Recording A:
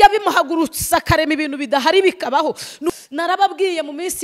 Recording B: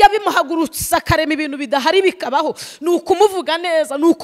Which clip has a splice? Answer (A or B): A